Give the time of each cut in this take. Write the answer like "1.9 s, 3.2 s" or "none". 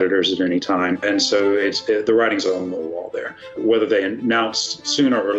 1.0 s, 3.5 s